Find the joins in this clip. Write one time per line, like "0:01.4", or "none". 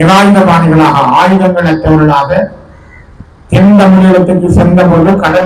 none